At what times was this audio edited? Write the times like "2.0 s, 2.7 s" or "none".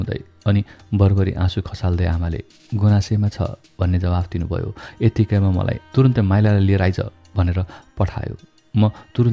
5.8 s